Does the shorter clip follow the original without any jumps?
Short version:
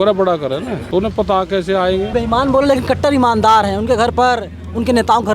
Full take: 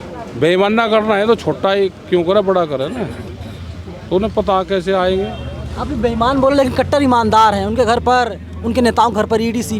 no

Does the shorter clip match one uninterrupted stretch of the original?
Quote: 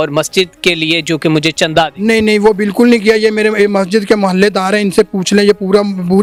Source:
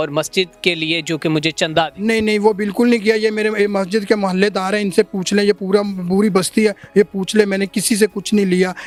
yes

